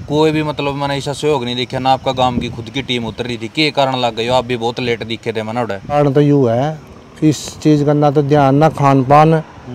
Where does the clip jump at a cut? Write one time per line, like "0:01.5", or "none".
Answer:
0:06.0

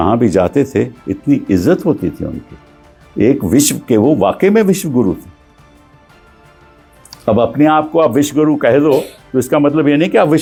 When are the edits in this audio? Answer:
none

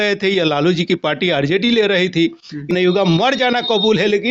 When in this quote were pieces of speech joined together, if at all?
0:02.7

